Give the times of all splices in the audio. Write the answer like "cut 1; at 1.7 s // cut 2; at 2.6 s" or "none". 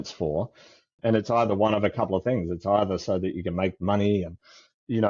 cut 1; at 1.0 s